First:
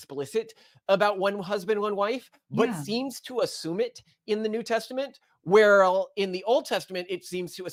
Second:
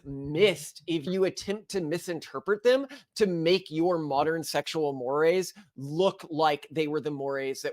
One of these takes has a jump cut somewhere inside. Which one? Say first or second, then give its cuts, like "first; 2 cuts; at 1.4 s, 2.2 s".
second; 1 cut; at 1.1 s